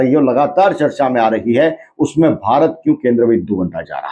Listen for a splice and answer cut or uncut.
uncut